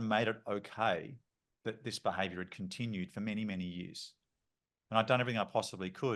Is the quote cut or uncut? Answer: uncut